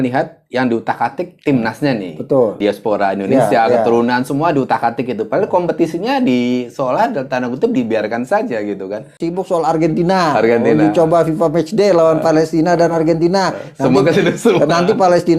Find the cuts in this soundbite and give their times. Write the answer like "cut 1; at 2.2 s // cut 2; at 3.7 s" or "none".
cut 1; at 2.6 s // cut 2; at 9.2 s